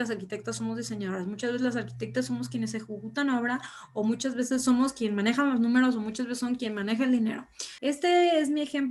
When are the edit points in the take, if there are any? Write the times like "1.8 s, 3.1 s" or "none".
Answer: 7.7 s